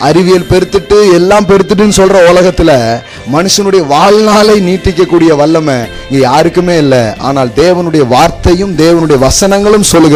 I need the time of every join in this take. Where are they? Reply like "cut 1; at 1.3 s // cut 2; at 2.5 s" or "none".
none